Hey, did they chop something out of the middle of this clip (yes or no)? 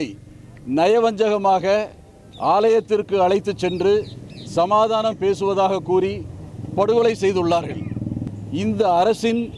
yes